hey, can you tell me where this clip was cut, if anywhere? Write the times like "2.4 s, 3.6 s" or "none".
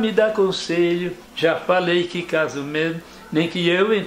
1.2 s